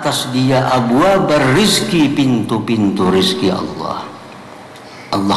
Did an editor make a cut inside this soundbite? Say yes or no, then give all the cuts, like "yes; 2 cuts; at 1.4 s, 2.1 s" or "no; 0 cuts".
no; 0 cuts